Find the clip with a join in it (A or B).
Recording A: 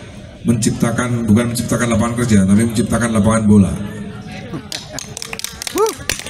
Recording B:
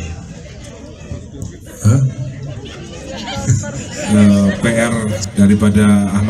B